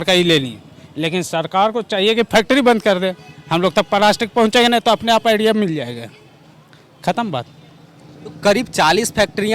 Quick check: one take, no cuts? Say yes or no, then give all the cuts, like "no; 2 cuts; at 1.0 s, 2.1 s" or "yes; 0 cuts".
yes; 0 cuts